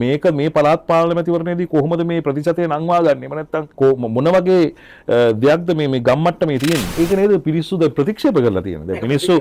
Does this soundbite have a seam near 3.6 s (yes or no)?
yes